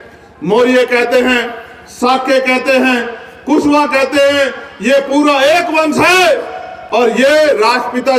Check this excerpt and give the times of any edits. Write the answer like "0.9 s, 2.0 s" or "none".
none